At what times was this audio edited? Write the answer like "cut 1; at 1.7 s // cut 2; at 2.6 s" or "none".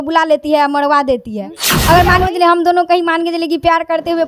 cut 1; at 1.7 s